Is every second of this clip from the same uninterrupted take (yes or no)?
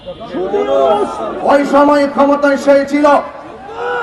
no